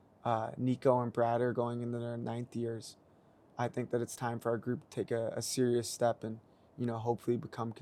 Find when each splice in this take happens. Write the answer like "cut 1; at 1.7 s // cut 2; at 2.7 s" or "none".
none